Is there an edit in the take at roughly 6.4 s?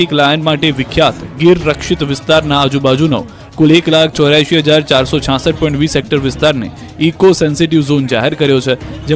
yes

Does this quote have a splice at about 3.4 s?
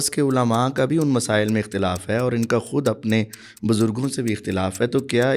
no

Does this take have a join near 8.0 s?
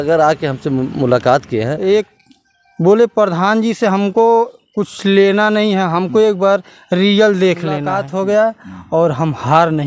yes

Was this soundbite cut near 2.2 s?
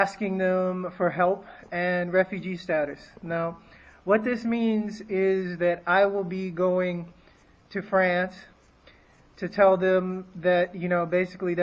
yes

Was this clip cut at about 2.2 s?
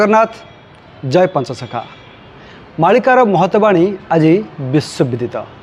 no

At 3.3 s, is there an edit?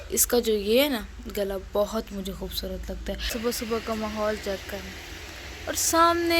yes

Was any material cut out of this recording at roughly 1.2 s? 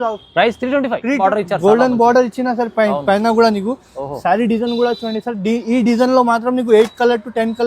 yes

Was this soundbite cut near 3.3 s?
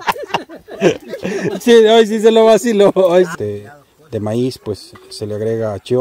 yes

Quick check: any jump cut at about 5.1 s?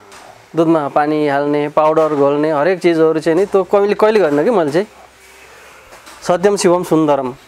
no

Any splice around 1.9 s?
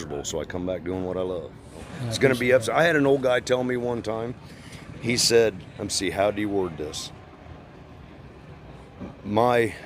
yes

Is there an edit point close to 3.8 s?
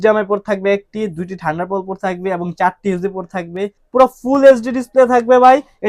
yes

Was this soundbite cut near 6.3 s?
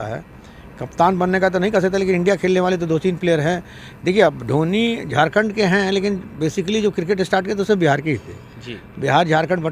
no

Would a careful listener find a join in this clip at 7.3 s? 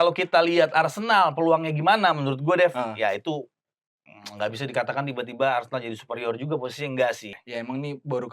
yes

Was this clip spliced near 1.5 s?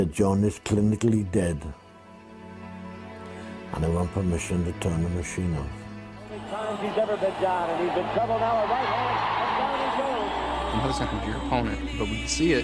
yes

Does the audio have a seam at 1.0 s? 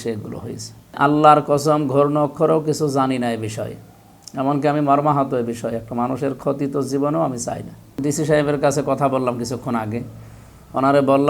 yes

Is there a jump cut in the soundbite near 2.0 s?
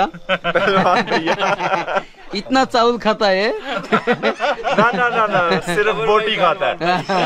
no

